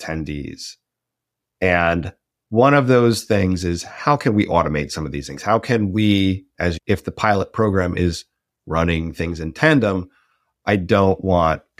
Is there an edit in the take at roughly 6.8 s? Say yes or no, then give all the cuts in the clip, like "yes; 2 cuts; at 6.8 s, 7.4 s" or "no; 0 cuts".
yes; 1 cut; at 6.8 s